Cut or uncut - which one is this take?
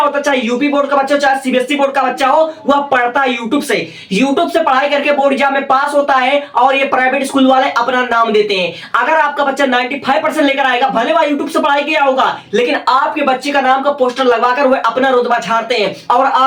uncut